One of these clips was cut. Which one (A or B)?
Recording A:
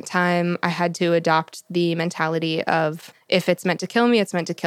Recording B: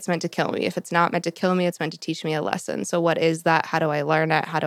A